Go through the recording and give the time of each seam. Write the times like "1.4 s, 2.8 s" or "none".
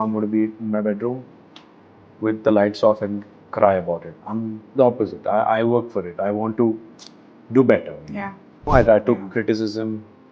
8.6 s